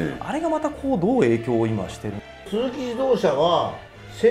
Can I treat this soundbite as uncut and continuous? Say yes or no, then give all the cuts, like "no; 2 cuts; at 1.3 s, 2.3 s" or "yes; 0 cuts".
no; 1 cut; at 2.2 s